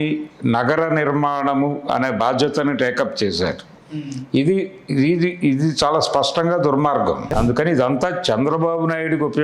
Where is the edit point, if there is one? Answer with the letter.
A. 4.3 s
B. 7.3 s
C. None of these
B